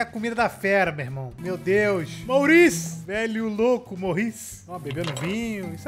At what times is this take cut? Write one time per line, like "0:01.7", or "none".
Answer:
0:04.6